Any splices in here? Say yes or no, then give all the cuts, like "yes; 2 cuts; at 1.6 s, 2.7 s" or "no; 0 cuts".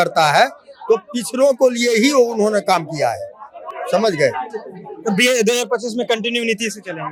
no; 0 cuts